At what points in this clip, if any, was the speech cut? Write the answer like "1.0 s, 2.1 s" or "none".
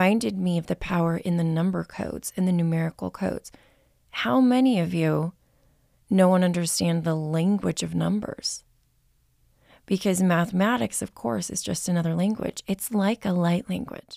none

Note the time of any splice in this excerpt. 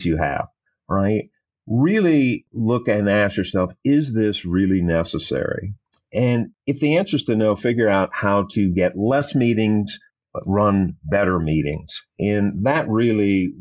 2.5 s, 6.6 s

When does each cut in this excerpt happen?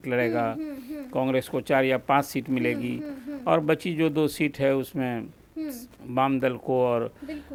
none

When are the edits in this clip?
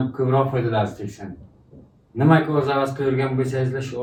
none

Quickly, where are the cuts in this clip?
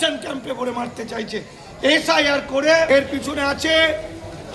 2.9 s

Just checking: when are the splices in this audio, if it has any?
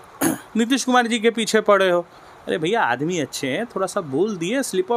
none

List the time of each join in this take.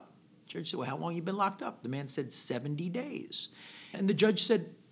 3.9 s

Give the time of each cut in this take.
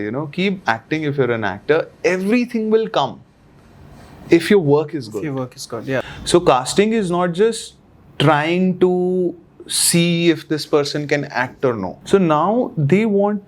6.0 s, 11.9 s

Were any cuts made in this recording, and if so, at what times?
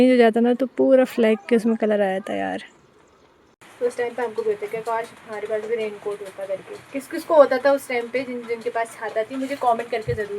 3.6 s

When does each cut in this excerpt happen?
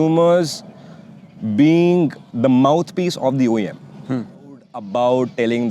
4.8 s

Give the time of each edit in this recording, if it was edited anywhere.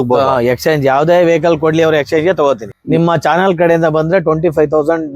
2.7 s

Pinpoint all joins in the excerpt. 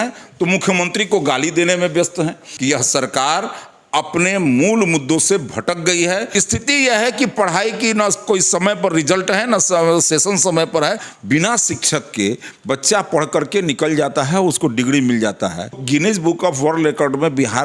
2.5 s, 6.3 s, 11.1 s, 15.8 s

